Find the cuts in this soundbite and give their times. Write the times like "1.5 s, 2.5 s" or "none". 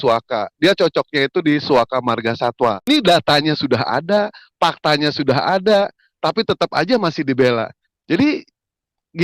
2.9 s